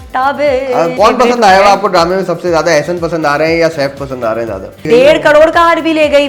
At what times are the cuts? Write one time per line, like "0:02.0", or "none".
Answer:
0:00.9
0:04.8